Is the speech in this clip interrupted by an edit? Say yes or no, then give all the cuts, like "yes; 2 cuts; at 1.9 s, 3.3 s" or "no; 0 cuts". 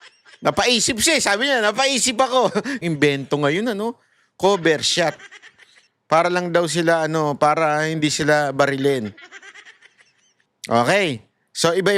yes; 1 cut; at 2.8 s